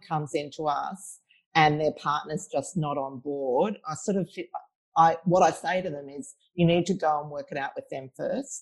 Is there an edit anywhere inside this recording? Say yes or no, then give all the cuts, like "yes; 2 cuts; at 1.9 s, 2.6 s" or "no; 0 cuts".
no; 0 cuts